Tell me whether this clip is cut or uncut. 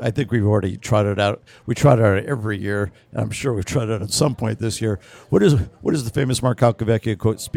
uncut